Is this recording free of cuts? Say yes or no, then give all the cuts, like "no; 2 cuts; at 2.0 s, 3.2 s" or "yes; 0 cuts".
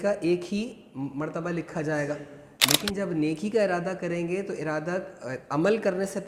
yes; 0 cuts